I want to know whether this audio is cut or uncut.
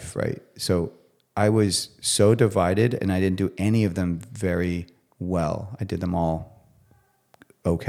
uncut